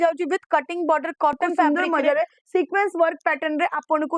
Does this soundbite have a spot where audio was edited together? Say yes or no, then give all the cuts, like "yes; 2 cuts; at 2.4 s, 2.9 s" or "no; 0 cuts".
yes; 1 cut; at 1.7 s